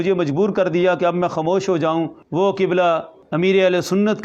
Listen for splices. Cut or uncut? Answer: cut